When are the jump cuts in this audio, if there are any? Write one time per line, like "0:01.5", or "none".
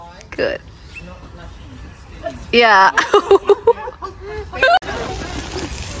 0:04.8